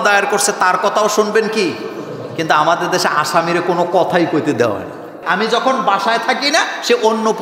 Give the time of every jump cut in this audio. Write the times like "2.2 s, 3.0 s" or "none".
5.2 s